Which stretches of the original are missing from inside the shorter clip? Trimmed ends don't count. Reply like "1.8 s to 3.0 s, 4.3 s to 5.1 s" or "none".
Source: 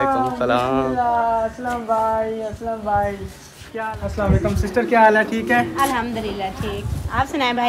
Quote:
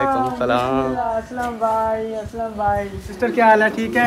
1.0 s to 1.3 s, 3.4 s to 4.6 s

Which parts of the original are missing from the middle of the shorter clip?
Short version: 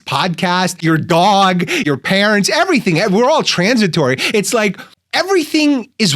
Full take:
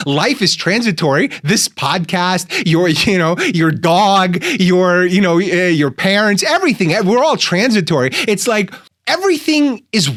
2.5 s to 3.5 s, 4.6 s to 5.8 s

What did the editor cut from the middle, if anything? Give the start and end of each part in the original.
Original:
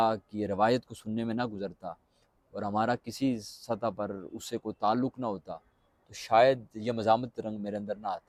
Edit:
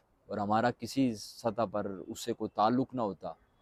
none

